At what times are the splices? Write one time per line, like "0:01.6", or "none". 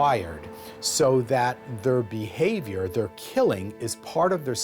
none

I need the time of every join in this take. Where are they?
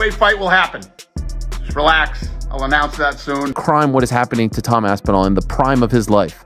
0:03.6

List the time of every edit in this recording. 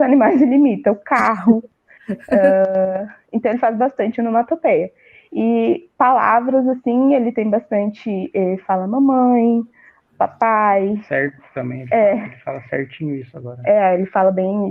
none

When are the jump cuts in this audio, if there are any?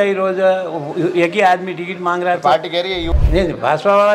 0:03.0

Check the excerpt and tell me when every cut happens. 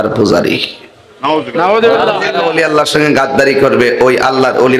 0:02.3

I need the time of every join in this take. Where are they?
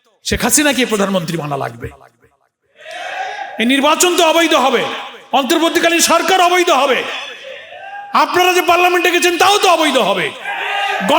none

